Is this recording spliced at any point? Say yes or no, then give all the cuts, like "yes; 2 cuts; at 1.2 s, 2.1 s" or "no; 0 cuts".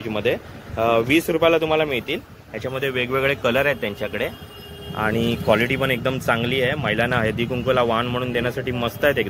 no; 0 cuts